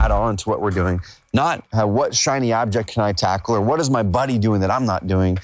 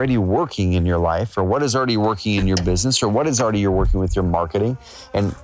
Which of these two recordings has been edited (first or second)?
first